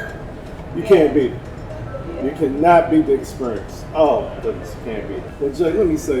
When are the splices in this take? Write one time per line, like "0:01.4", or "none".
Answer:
0:05.3